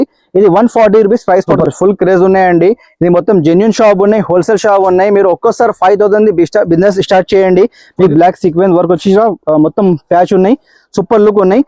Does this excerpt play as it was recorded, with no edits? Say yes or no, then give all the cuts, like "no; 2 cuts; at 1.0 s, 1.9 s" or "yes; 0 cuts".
no; 2 cuts; at 1.5 s, 8.1 s